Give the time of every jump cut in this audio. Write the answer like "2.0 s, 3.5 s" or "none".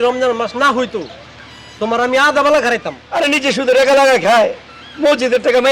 3.0 s

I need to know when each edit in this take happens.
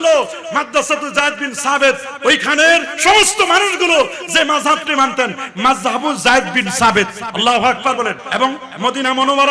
8.2 s

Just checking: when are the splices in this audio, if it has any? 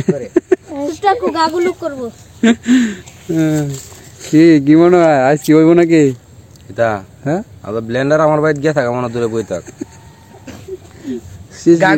none

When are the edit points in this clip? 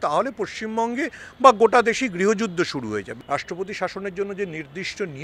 3.1 s

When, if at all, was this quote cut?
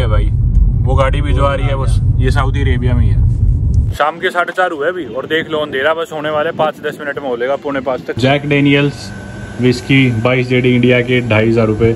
3.9 s, 8.2 s

